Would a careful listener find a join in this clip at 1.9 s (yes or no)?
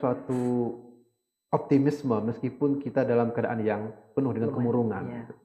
no